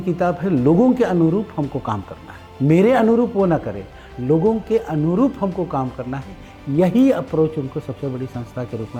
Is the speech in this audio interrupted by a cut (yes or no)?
no